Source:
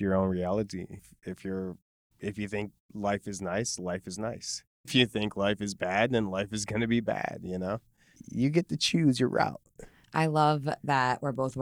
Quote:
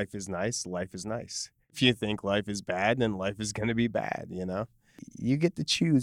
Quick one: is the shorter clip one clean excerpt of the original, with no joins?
yes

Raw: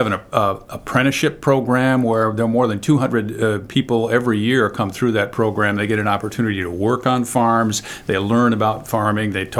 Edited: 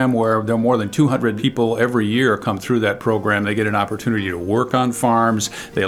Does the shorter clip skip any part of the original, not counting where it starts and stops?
yes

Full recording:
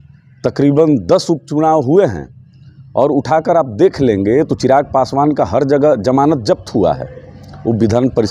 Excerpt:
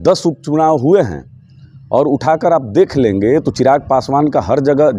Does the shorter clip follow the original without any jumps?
yes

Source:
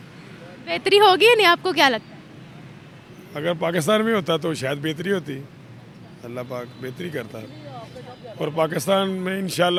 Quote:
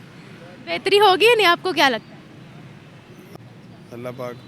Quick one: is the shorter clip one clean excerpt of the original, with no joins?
no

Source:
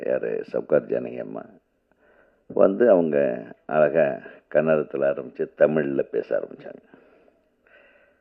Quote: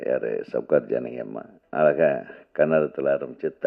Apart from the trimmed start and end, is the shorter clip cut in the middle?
yes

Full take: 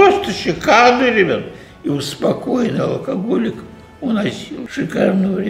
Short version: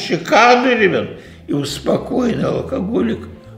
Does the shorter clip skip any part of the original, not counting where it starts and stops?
no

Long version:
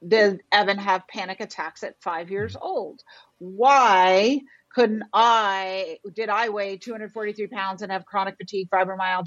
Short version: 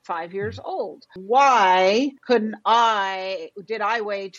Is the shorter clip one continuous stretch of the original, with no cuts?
no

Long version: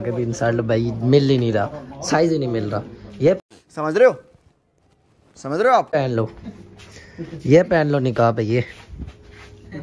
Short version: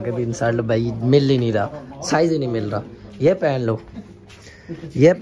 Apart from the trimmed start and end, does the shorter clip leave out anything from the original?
yes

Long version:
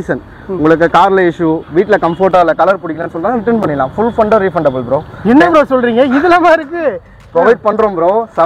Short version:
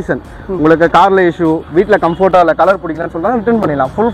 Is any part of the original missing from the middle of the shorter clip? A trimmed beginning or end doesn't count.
no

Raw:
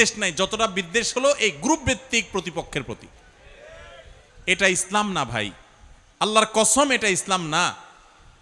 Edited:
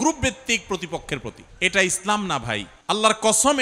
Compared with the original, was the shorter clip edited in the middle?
yes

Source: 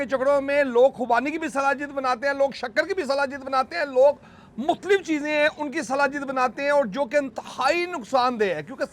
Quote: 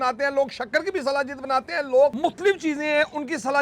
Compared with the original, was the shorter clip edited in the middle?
yes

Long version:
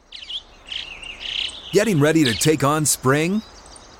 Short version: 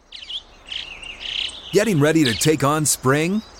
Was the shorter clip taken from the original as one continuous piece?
yes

